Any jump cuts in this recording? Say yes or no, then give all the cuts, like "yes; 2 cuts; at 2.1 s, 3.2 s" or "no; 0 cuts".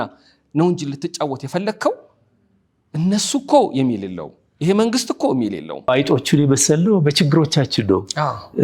yes; 1 cut; at 5.9 s